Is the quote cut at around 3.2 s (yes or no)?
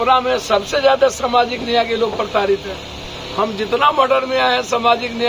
no